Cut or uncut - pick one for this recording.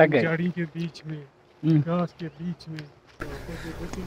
cut